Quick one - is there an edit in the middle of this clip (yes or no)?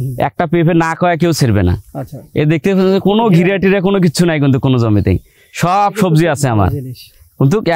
no